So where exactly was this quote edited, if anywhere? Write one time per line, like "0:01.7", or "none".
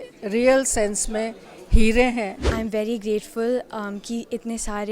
0:02.5

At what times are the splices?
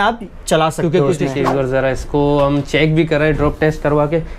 0:01.3

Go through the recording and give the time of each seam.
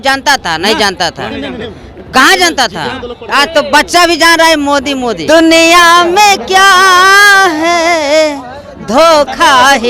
0:05.2

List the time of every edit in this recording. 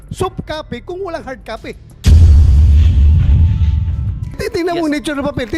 0:01.9

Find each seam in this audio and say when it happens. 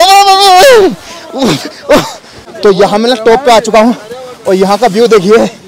none

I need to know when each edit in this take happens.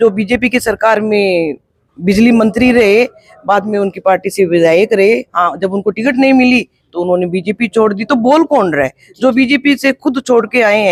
none

